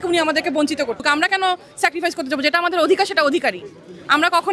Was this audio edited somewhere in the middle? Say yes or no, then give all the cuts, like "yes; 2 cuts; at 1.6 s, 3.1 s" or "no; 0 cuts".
yes; 1 cut; at 1.0 s